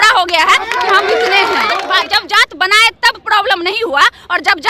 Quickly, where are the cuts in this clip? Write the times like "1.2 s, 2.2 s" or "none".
1.8 s